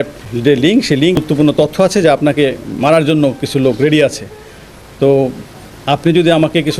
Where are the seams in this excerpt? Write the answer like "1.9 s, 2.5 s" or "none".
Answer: 1.2 s

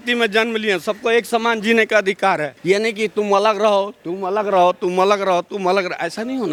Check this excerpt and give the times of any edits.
none

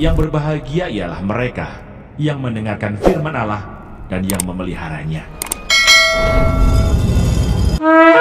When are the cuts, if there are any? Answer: none

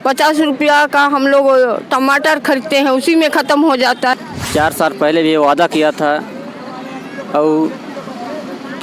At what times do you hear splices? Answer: 4.1 s

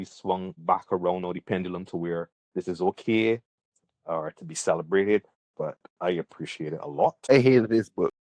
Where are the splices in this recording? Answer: 7.2 s

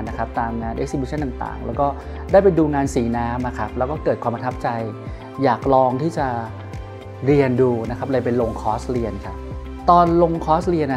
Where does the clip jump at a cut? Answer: none

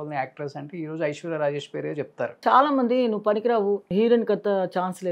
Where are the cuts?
2.4 s, 3.9 s

